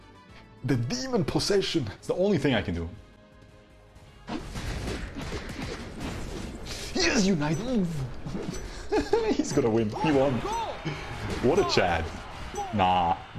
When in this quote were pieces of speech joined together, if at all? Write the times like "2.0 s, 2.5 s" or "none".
1.9 s